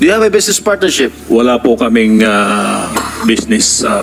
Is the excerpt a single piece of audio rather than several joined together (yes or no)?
no